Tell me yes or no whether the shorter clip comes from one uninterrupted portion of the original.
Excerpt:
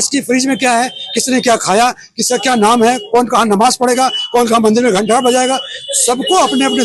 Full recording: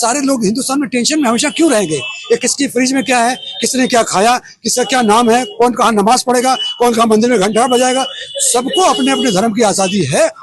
yes